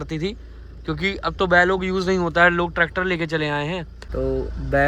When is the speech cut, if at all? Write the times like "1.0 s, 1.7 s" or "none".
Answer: 4.0 s